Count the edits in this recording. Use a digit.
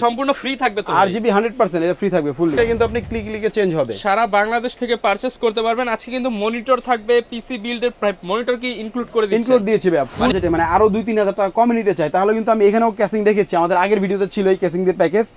2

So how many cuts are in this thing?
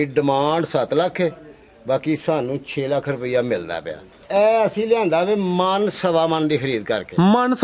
1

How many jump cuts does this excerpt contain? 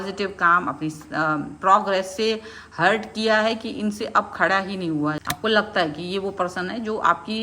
1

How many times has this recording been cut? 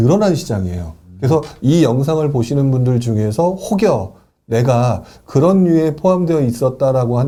0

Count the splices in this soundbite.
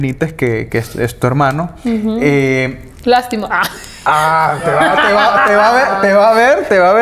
0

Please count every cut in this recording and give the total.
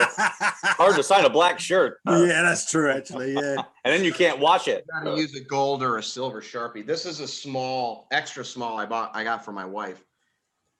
0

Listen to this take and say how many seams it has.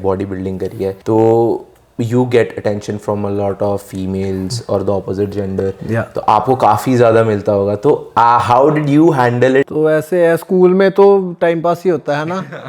3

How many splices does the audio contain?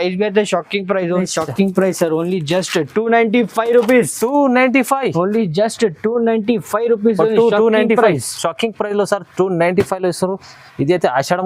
1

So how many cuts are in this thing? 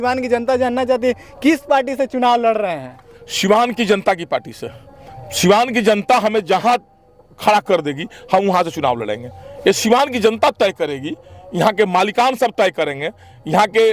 0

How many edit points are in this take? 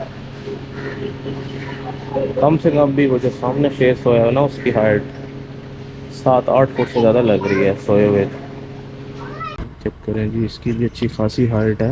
1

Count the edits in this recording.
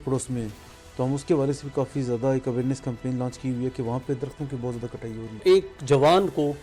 1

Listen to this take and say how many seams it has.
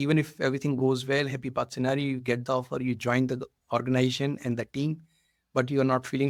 0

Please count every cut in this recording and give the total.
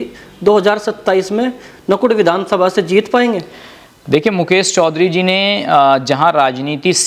0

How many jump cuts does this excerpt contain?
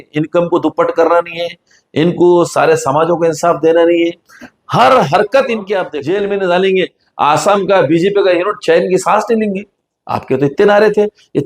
1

